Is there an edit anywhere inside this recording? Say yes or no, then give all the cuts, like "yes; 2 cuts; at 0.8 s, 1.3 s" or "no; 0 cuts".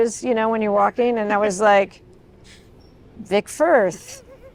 no; 0 cuts